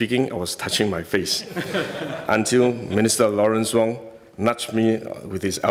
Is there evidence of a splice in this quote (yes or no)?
no